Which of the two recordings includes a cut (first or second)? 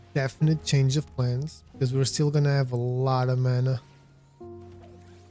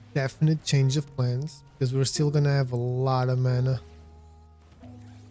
first